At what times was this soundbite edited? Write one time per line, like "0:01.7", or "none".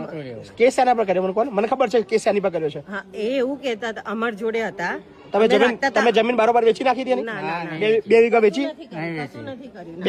none